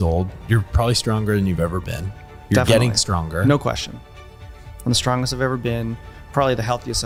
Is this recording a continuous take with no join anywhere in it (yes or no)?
yes